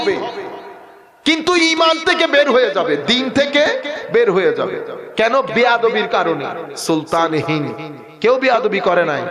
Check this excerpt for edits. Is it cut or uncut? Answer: cut